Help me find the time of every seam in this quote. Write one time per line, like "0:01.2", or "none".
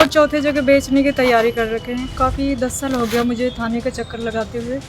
0:02.2